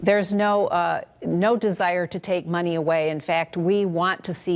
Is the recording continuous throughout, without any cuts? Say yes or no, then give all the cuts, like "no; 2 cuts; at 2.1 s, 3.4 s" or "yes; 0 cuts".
yes; 0 cuts